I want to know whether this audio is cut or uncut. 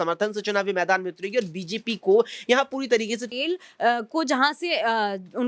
cut